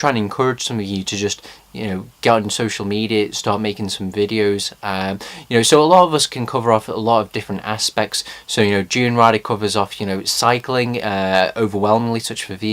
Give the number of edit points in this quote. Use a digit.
1